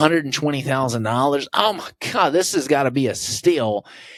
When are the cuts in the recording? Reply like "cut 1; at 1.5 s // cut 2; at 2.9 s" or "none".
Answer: none